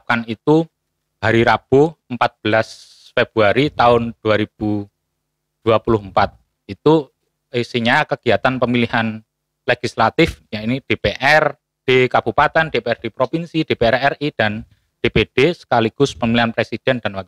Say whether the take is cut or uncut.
uncut